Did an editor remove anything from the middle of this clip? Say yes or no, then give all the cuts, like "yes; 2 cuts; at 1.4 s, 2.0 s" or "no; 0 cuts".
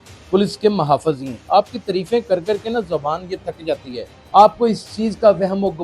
yes; 1 cut; at 4.1 s